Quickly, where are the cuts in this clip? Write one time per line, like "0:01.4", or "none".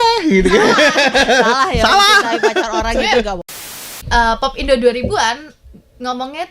0:03.9